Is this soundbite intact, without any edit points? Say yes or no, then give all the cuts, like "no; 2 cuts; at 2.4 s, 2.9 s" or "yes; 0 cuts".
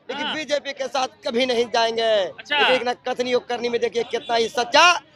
yes; 0 cuts